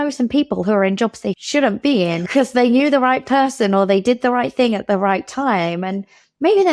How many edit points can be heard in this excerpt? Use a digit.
2